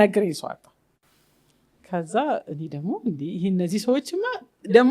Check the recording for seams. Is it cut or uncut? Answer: uncut